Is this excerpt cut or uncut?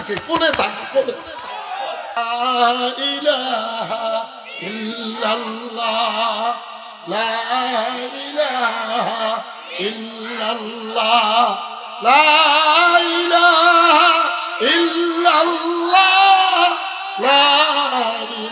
cut